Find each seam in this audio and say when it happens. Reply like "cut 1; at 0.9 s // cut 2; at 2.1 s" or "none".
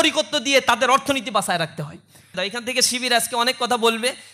cut 1; at 2.3 s